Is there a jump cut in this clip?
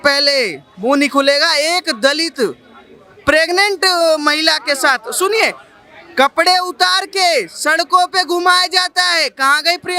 no; 0 cuts

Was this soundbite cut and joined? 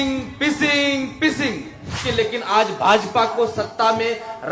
yes; 1 cut; at 2.0 s

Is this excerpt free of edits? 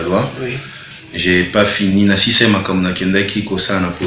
yes; 0 cuts

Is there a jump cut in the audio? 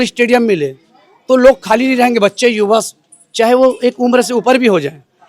no; 0 cuts

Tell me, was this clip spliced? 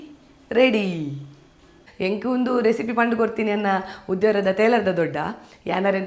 yes; 1 cut; at 1.8 s

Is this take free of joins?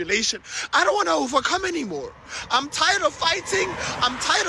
yes; 0 cuts

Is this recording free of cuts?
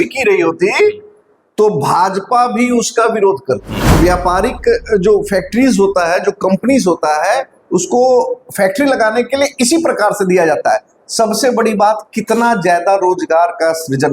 no; 1 cut; at 3.8 s

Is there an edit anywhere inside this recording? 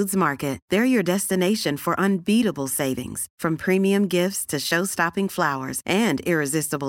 no; 0 cuts

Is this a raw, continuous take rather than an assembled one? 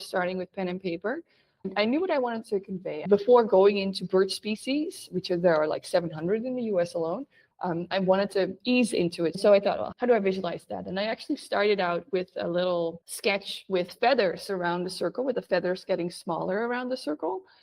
no; 2 cuts; at 1.7 s, 9.4 s

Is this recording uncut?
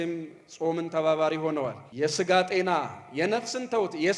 no; 1 cut; at 1.8 s

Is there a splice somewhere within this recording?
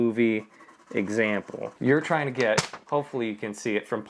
yes; 1 cut; at 1.8 s

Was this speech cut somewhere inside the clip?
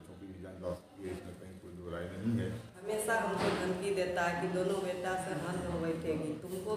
yes; 1 cut; at 2.8 s

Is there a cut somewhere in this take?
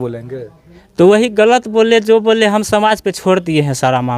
no; 0 cuts

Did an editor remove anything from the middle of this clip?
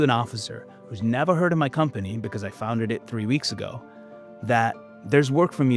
no; 0 cuts

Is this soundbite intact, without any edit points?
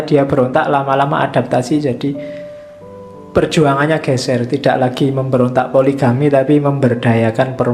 yes; 0 cuts

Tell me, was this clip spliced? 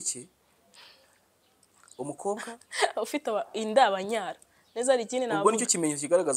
no; 0 cuts

